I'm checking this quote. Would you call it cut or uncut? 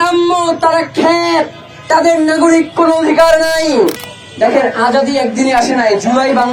cut